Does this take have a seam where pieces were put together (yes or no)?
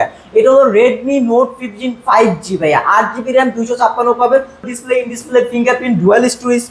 yes